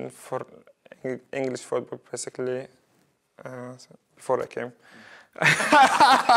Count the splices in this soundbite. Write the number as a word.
zero